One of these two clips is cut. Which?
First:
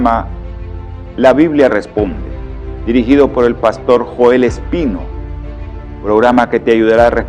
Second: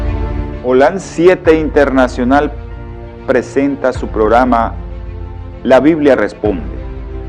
second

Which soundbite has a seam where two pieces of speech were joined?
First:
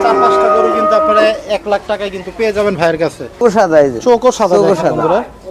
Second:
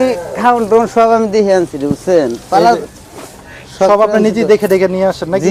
first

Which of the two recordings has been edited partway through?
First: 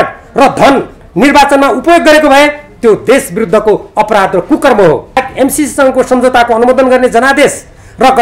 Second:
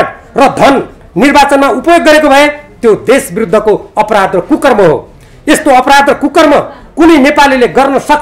first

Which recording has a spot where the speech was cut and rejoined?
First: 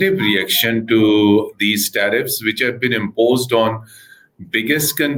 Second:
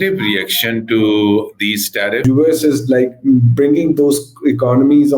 second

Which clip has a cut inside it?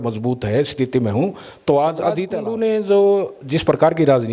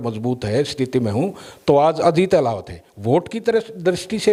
first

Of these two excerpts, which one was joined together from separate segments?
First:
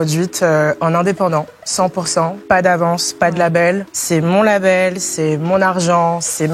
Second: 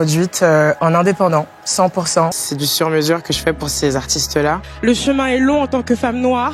second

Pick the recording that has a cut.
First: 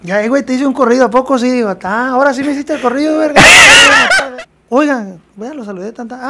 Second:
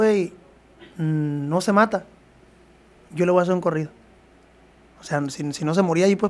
first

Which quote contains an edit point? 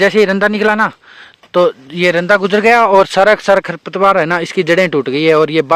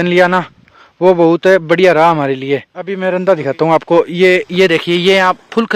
second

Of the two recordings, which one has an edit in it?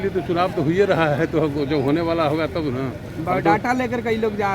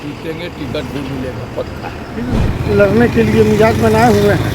second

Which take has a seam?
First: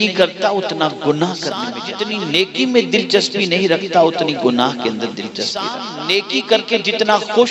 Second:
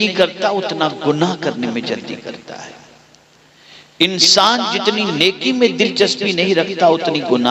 first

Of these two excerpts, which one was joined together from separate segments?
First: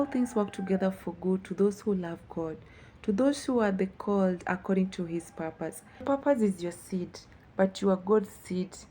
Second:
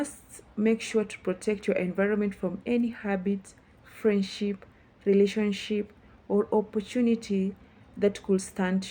first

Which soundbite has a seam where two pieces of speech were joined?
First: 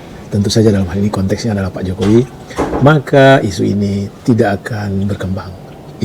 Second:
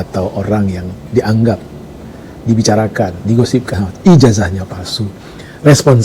second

